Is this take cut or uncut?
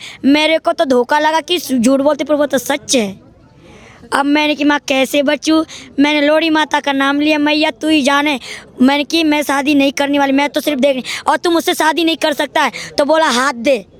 uncut